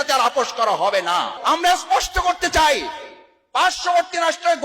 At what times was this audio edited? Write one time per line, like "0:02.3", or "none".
0:01.3